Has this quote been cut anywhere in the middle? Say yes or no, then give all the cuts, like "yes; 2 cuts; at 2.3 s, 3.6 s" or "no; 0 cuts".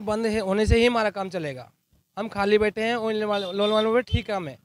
no; 0 cuts